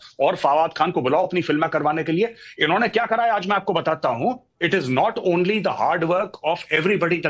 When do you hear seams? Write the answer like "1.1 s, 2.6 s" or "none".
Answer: none